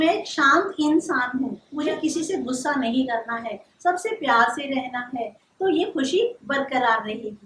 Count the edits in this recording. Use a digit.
1